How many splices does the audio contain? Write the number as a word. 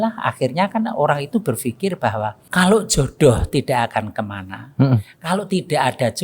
one